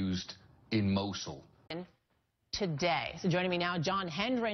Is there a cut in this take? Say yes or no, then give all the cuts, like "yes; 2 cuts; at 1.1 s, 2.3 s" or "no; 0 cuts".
no; 0 cuts